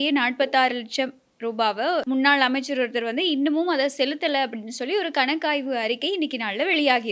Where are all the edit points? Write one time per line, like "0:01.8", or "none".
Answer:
0:02.0